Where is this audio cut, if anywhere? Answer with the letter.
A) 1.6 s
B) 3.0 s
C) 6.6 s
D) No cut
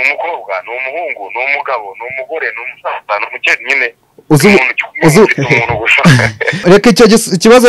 C